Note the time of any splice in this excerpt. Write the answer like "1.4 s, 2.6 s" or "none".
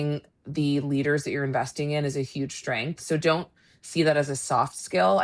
none